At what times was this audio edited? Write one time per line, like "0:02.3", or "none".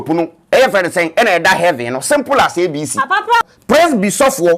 0:03.4